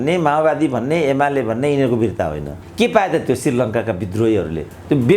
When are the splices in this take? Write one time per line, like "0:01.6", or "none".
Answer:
0:02.6